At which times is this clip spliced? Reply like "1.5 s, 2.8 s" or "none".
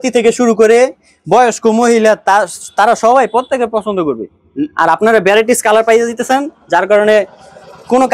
none